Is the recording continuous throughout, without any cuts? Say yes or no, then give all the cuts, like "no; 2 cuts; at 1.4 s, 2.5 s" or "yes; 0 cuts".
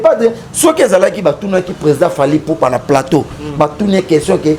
yes; 0 cuts